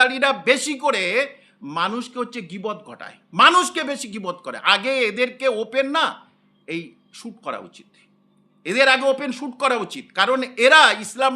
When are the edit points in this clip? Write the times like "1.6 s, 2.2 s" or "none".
none